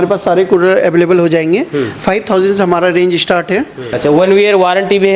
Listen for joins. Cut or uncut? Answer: cut